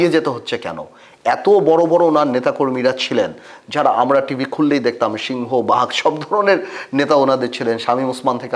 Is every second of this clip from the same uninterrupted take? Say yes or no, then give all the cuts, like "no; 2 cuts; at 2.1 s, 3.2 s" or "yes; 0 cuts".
yes; 0 cuts